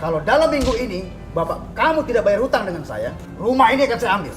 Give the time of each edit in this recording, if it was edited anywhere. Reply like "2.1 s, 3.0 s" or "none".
3.2 s